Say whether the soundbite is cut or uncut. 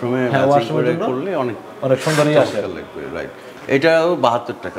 uncut